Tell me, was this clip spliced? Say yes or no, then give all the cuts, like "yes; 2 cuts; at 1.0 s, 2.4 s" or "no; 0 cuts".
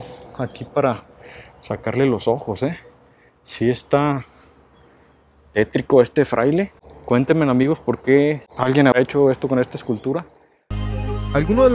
no; 0 cuts